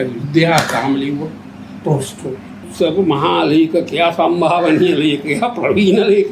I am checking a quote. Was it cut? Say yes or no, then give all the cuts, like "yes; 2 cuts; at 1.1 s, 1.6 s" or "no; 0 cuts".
yes; 1 cut; at 2.7 s